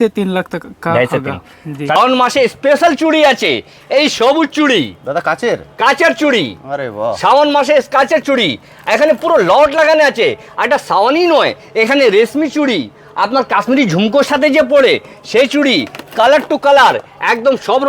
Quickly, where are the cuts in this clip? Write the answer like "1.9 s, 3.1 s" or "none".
2.0 s